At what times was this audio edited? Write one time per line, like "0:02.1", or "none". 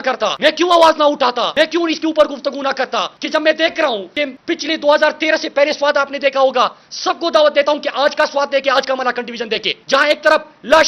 none